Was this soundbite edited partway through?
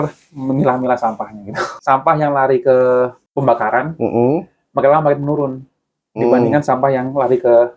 yes; 2 cuts; at 1.7 s, 3.2 s

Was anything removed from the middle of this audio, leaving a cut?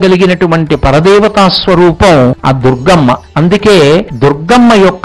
yes; 3 cuts; at 2.4 s, 3.3 s, 4.1 s

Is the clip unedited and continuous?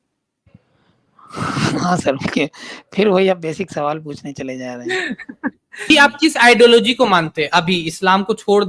no; 1 cut; at 5.9 s

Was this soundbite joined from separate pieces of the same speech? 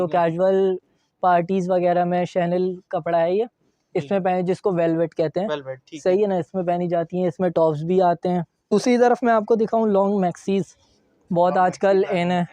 yes; 1 cut; at 8.7 s

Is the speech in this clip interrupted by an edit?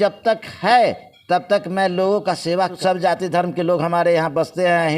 yes; 1 cut; at 2.8 s

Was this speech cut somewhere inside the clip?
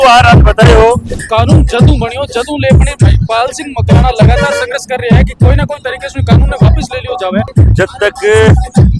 yes; 2 cuts; at 1.2 s, 7.5 s

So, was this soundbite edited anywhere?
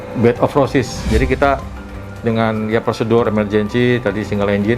yes; 1 cut; at 1.0 s

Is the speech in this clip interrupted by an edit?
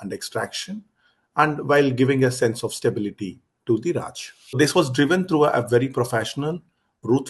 yes; 1 cut; at 4.6 s

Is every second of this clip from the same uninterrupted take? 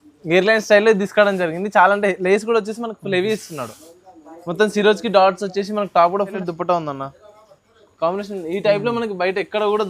no; 1 cut; at 6.4 s

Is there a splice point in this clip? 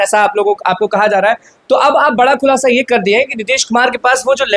no; 0 cuts

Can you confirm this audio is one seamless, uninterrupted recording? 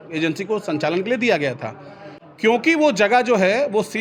yes; 0 cuts

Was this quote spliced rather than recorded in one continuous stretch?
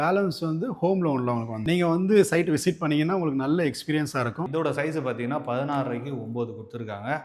yes; 2 cuts; at 1.6 s, 4.5 s

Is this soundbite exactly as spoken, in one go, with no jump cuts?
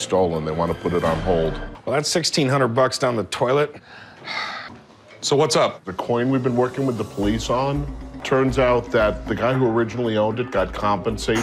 no; 1 cut; at 4.7 s

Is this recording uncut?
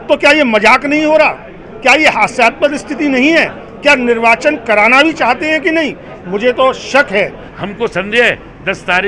no; 1 cut; at 7.3 s

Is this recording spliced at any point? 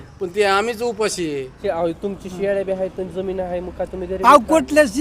yes; 1 cut; at 1.5 s

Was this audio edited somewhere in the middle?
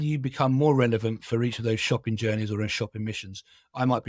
no; 0 cuts

